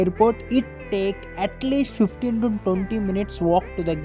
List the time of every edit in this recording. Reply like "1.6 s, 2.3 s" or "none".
none

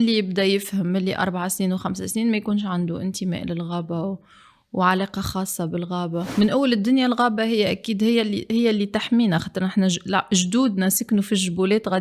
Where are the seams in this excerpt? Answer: 6.3 s

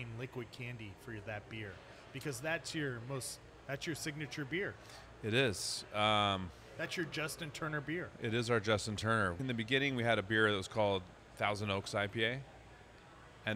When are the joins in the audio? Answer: 9.4 s

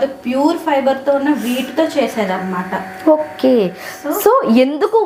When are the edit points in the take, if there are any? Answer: none

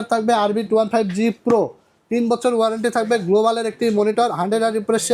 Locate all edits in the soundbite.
none

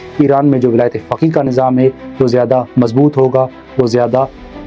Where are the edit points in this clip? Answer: none

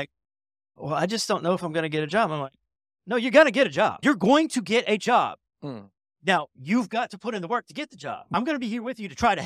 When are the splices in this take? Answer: none

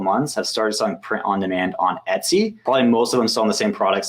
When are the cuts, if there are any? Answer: 2.6 s

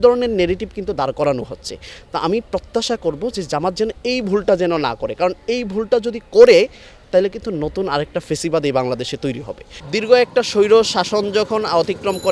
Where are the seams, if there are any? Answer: 9.7 s

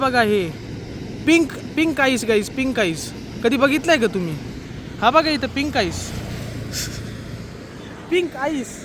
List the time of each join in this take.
3.1 s

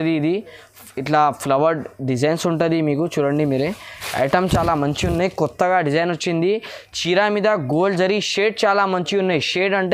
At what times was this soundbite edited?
none

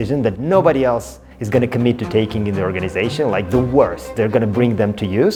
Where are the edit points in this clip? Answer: none

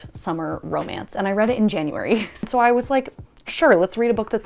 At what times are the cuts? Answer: 2.4 s

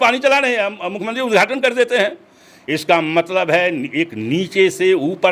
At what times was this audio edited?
none

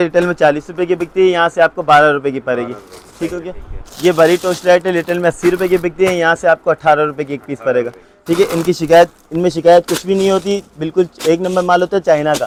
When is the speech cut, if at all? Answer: none

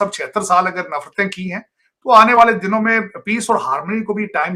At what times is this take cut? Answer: none

